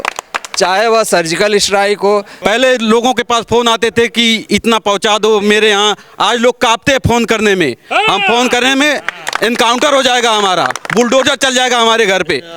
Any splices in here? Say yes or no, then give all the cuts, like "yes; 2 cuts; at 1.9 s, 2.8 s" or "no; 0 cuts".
yes; 1 cut; at 2.3 s